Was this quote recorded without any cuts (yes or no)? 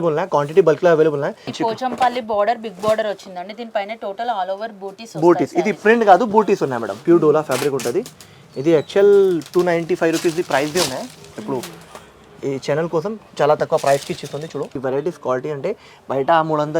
no